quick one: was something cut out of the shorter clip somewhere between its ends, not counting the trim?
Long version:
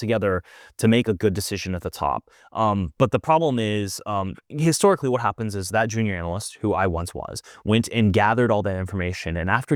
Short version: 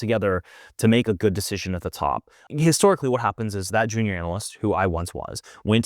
yes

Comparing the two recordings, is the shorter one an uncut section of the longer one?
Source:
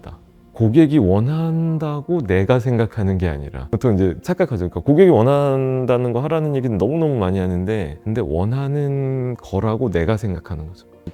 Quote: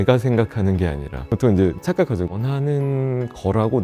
no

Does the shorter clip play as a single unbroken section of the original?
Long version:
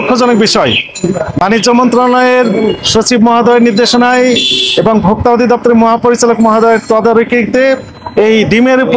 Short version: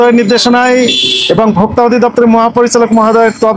yes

